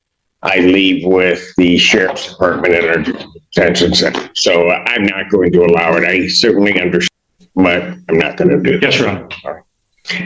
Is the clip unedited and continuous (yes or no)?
no